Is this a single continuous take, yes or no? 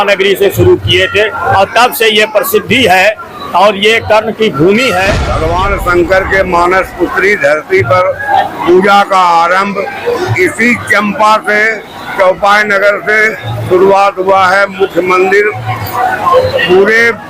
no